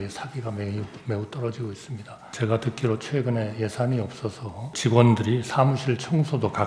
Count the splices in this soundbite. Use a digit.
2